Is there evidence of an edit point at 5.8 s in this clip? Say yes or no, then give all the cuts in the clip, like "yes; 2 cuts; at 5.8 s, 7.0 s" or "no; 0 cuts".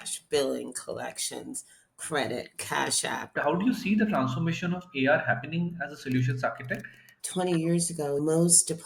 no; 2 cuts; at 3.3 s, 7.2 s